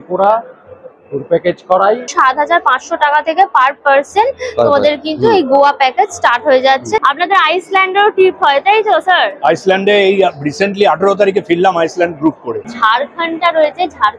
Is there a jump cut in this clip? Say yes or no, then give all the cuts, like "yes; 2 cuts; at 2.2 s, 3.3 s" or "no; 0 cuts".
yes; 3 cuts; at 2.1 s, 7.0 s, 12.7 s